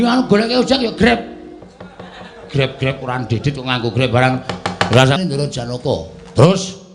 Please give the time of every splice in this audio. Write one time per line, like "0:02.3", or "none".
0:05.2